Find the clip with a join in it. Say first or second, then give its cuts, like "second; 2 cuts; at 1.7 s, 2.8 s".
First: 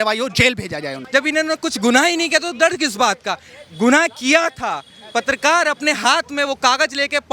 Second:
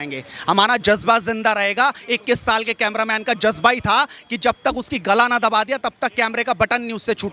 first; 1 cut; at 1.0 s